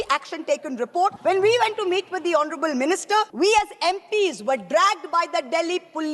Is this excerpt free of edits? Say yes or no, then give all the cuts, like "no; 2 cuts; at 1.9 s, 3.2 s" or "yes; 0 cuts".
no; 2 cuts; at 1.2 s, 3.3 s